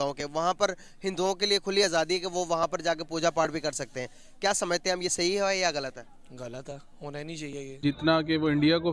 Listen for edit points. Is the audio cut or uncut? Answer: cut